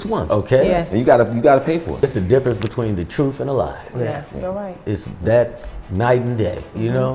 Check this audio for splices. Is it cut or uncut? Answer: cut